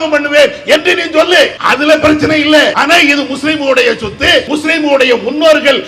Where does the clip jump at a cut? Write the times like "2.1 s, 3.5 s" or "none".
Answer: 1.6 s, 2.8 s, 4.5 s